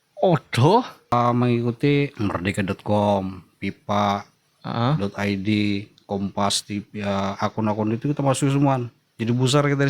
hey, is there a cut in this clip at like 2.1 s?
yes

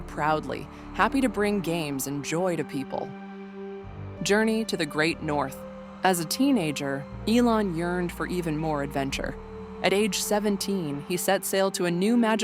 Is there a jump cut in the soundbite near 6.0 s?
no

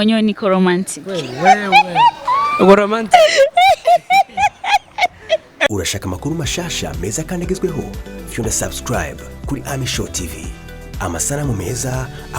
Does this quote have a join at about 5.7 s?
yes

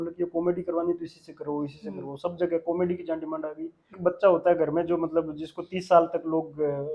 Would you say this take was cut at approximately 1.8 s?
no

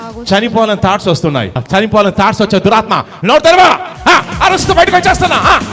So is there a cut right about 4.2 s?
no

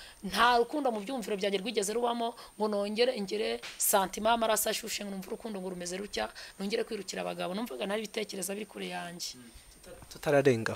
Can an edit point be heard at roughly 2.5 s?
no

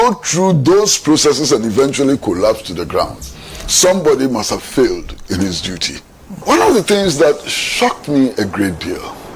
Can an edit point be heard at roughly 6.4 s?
yes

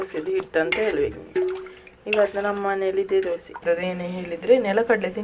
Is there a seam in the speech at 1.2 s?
no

